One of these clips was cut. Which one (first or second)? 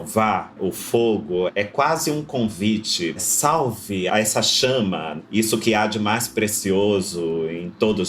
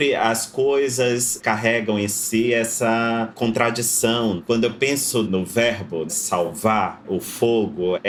first